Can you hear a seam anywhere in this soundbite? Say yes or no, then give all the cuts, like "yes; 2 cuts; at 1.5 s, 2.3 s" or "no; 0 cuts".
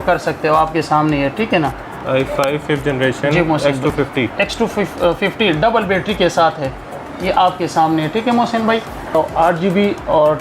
yes; 2 cuts; at 1.9 s, 9.1 s